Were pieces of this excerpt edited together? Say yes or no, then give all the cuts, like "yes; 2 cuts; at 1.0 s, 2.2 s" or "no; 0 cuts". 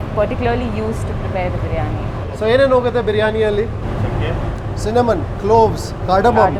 no; 0 cuts